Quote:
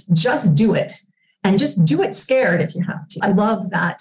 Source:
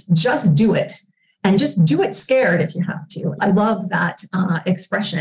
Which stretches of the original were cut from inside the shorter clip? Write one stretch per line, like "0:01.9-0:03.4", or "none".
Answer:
0:03.1-0:03.3